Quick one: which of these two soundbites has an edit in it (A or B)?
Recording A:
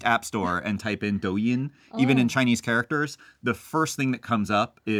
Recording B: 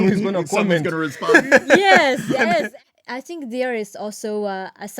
B